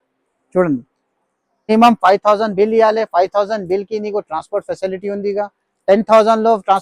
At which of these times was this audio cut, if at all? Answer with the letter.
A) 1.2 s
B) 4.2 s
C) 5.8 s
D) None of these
A